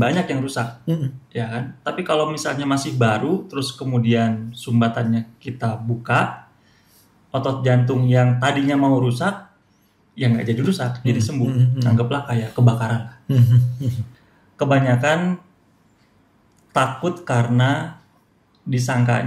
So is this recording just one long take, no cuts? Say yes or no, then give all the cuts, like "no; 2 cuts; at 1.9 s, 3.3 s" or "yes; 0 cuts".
no; 1 cut; at 14.0 s